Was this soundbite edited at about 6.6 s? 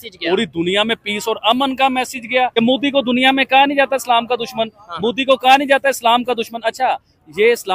no; 1 cut; at 2.5 s

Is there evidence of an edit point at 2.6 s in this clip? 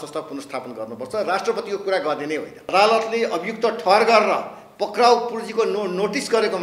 yes; 1 cut; at 2.6 s

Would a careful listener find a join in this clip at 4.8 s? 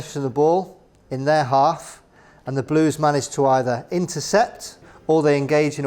yes; 1 cut; at 4.8 s

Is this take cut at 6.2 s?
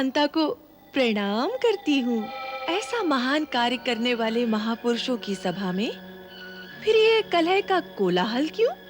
no; 1 cut; at 2.6 s

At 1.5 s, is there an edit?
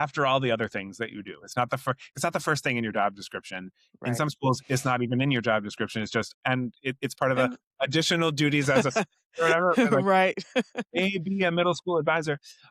no; 0 cuts

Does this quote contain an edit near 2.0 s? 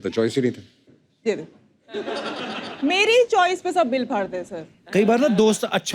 no; 0 cuts

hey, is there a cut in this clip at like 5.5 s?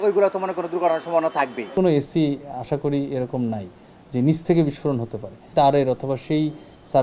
yes; 2 cuts; at 1.7 s, 5.5 s

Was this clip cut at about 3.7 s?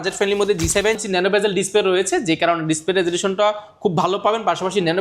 no; 1 cut; at 1.0 s

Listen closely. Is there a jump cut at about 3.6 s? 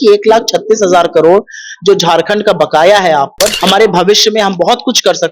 yes; 1 cut; at 3.6 s

